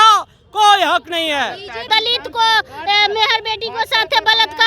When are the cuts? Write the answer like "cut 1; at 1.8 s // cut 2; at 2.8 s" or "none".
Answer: cut 1; at 1.9 s